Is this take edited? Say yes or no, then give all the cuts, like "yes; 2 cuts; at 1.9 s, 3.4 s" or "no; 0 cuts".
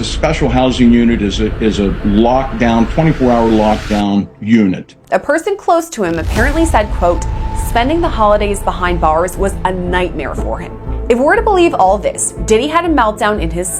yes; 1 cut; at 4.9 s